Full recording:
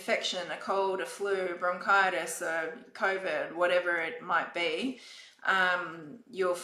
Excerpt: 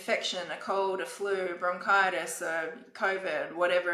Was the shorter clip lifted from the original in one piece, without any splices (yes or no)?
yes